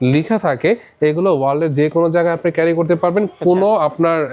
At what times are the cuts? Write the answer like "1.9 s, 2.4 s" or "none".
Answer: none